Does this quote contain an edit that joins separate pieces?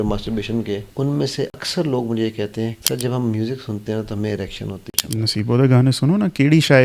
yes; 3 cuts; at 1.2 s, 2.8 s, 4.9 s

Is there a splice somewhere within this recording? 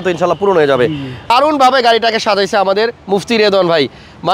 yes; 1 cut; at 1.3 s

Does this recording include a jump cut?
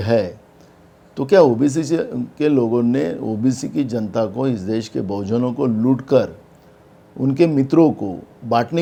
no; 0 cuts

